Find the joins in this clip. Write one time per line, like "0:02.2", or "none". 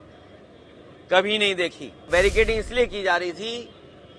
0:02.1